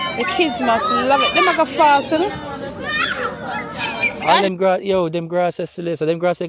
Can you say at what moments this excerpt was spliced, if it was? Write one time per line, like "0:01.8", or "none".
0:04.4